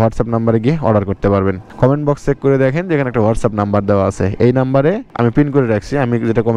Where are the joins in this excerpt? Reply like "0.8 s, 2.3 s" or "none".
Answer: none